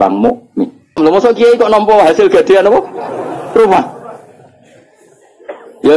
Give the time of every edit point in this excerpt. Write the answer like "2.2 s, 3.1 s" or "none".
1.0 s